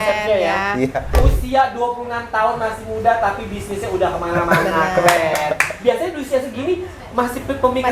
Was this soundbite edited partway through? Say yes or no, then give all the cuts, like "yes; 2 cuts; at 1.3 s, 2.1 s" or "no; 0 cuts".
yes; 1 cut; at 1.1 s